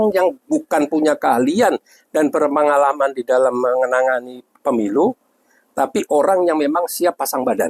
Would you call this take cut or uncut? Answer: uncut